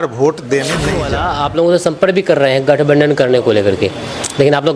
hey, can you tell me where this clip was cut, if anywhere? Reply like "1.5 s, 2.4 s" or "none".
1.1 s